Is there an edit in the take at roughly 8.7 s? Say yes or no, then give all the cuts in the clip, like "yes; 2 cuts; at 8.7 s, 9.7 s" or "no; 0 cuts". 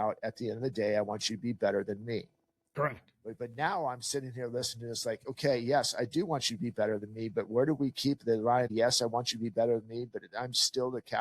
yes; 1 cut; at 8.7 s